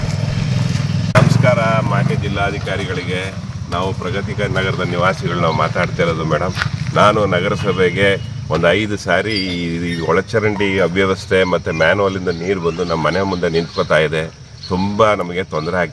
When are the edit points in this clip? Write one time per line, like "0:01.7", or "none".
0:01.1